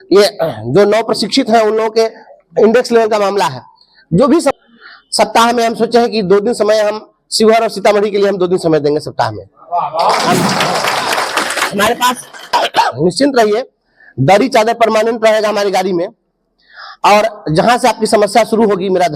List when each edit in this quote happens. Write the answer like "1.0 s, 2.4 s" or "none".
4.5 s, 12.5 s